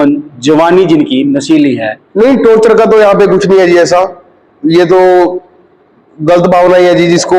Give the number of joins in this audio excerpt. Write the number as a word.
one